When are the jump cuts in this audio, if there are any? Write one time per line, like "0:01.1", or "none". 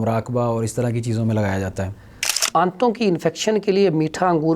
0:02.2